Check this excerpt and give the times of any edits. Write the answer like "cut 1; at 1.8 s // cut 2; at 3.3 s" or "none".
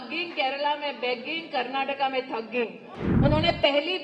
cut 1; at 2.9 s